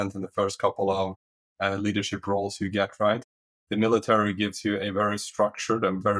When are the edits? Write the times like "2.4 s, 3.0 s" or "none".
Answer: none